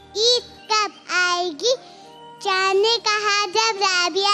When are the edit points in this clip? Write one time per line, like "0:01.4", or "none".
none